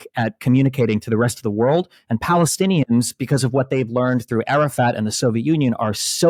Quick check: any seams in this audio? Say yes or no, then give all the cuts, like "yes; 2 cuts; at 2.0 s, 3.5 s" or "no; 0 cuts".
no; 0 cuts